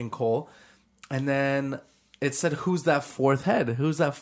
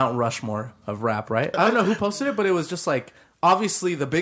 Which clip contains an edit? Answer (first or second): second